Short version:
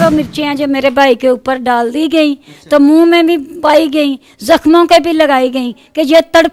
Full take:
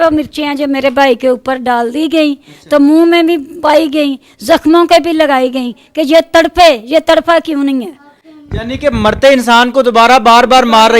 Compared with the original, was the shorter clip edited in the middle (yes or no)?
no